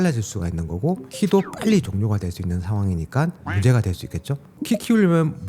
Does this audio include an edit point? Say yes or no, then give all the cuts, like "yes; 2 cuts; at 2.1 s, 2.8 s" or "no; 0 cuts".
yes; 1 cut; at 4.5 s